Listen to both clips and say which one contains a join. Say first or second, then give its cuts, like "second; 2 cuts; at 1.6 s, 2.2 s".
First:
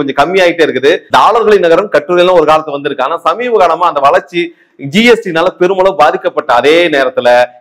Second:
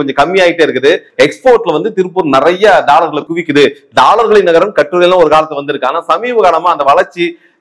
first; 1 cut; at 1.0 s